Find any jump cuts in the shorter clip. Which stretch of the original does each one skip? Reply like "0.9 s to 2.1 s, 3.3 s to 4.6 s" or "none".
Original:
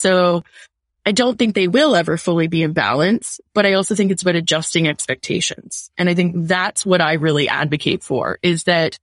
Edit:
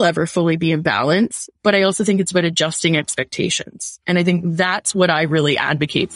none

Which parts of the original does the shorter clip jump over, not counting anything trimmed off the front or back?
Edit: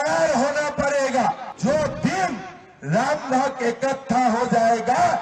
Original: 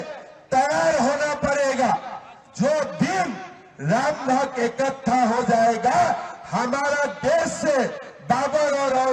2.1 s to 2.4 s

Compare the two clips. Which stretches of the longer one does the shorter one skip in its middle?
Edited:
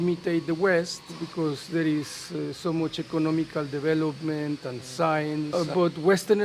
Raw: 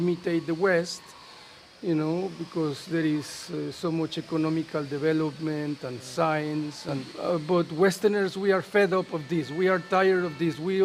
1.2 s to 2.4 s, 6.7 s to 7.2 s

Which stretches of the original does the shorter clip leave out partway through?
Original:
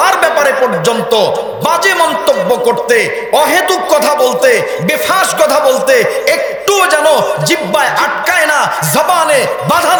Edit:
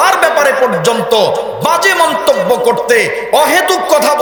none

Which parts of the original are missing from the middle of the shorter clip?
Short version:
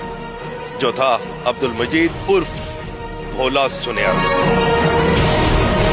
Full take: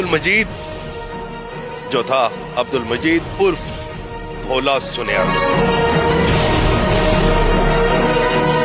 none

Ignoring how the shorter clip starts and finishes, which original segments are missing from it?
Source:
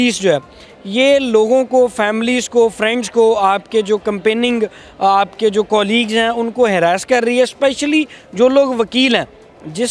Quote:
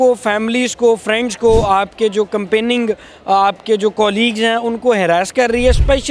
none

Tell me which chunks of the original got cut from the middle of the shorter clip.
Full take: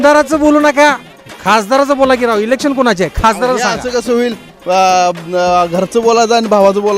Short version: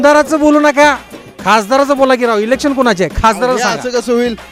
none

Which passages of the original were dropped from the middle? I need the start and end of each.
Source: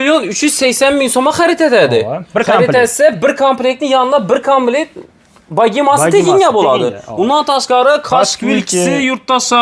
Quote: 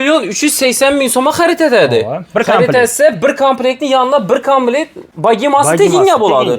5.3 s to 5.6 s

